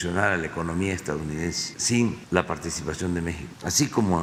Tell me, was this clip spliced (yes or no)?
no